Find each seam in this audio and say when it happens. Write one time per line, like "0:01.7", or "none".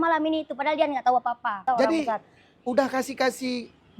0:01.6